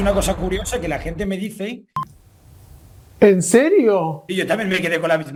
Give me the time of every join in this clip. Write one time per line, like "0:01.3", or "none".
none